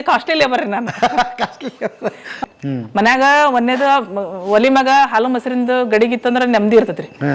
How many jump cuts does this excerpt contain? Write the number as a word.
one